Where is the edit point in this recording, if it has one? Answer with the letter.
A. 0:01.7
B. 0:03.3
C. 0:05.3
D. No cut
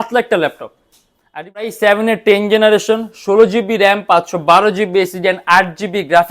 A